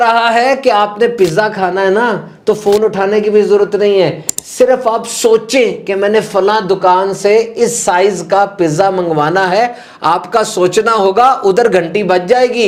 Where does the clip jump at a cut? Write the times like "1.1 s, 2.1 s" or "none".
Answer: none